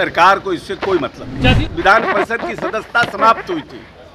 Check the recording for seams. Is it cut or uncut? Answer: cut